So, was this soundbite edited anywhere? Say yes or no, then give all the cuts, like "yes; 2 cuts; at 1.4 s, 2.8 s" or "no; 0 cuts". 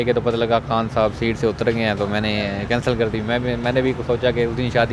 no; 0 cuts